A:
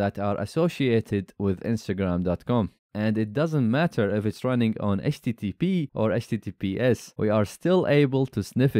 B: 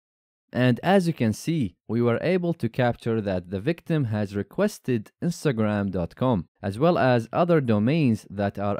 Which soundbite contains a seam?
A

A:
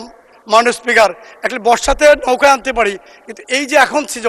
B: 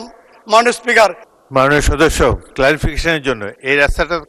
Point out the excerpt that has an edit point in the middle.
B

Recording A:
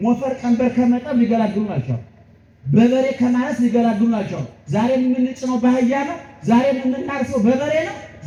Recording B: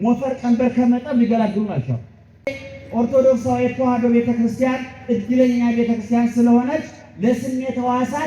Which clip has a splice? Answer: B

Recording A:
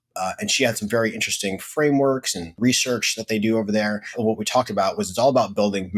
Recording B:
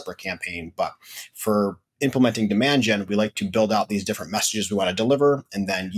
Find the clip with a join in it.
A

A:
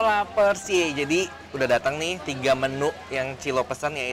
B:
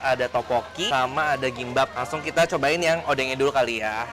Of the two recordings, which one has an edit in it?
B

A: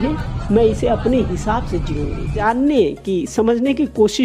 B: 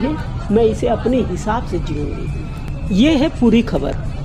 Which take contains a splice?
A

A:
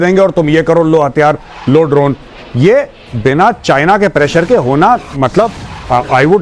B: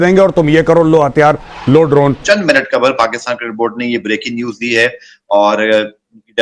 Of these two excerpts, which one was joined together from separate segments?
B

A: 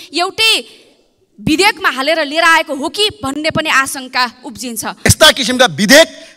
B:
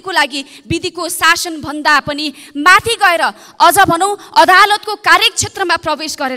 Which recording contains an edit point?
A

